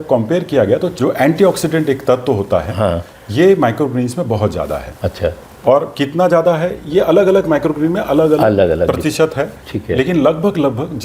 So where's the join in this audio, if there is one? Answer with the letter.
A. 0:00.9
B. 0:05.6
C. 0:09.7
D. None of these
A